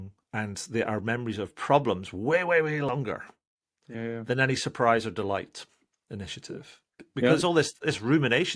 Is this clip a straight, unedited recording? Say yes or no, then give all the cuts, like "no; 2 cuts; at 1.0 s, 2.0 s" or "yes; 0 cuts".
yes; 0 cuts